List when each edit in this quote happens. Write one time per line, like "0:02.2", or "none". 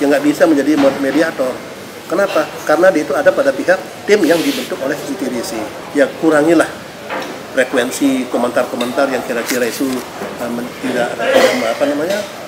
0:05.8